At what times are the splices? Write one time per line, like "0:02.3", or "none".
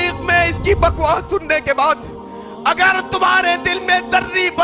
none